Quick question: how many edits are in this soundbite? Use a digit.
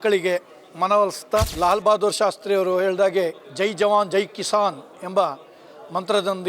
1